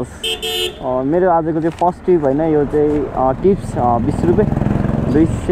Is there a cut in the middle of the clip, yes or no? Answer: no